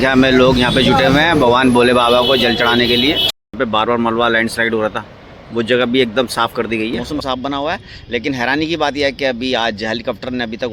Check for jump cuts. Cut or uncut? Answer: cut